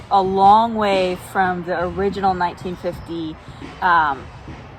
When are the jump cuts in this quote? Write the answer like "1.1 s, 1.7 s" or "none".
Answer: none

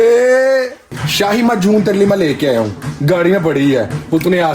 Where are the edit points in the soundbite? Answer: 1.0 s, 2.9 s

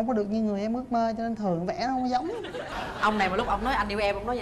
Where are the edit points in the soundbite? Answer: 2.6 s

